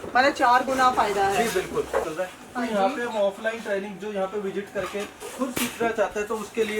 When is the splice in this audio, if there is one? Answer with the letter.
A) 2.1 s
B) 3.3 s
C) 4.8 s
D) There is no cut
A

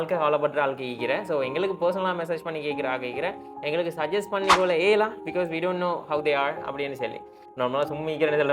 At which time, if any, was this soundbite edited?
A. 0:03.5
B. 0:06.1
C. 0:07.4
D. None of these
C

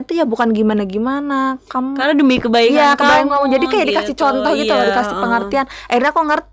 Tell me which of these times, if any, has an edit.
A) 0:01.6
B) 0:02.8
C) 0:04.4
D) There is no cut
D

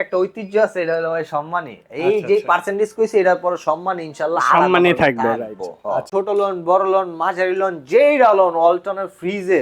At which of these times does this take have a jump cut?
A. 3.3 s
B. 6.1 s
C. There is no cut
B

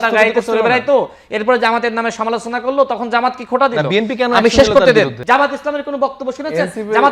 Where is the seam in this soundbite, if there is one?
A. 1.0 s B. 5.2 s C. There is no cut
B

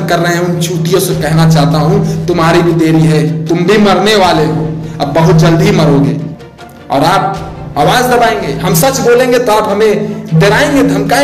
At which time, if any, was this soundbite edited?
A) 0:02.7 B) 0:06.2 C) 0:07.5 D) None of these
B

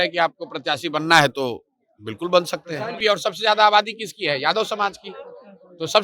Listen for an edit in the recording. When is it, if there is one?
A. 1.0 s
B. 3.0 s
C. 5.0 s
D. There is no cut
B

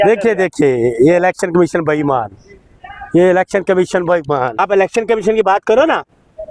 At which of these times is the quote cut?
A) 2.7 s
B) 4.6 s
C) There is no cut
B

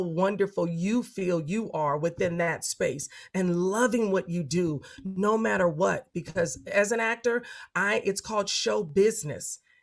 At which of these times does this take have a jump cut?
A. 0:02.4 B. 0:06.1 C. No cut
C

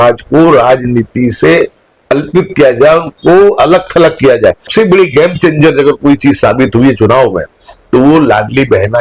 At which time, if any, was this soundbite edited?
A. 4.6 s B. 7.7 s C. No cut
A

